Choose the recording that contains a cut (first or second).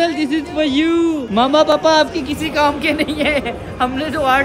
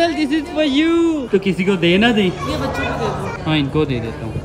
second